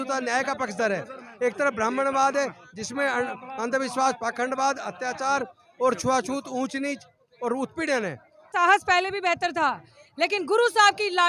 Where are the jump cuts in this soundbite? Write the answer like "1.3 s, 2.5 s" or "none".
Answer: 8.5 s